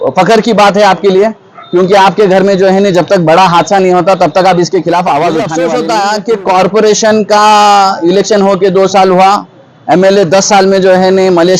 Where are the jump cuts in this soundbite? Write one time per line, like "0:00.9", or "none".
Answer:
0:05.6

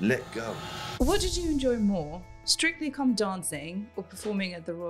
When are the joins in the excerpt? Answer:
0:00.9

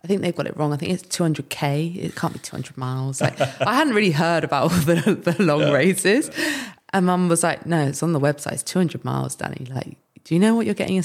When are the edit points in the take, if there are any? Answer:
none

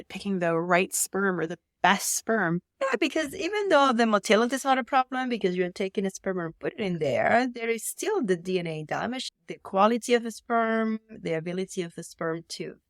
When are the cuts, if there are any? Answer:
0:11.2

